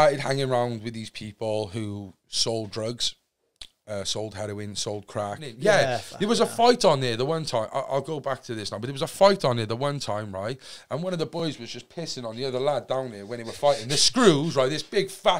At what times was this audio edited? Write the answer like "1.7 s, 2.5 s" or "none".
5.5 s